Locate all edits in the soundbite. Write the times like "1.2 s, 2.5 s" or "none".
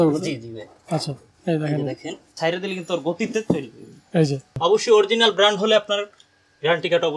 2.3 s, 4.5 s